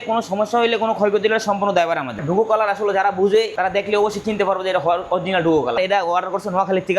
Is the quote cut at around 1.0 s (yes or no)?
no